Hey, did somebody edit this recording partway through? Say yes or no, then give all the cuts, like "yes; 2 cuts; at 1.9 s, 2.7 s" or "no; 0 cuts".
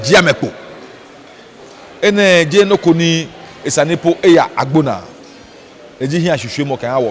no; 0 cuts